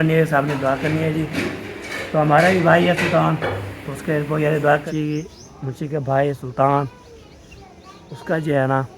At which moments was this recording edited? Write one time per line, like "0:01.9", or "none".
0:04.8